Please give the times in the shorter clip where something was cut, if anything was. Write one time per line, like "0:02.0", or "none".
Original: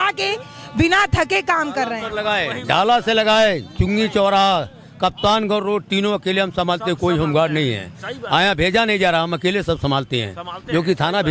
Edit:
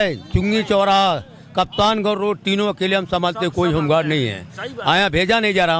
none